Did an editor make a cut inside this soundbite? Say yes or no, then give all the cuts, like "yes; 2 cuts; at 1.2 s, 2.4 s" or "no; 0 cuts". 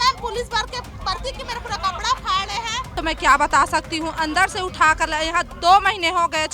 yes; 1 cut; at 3.0 s